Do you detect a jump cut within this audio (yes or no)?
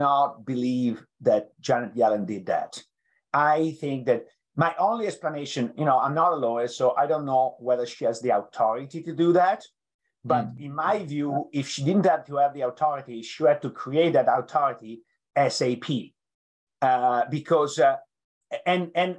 no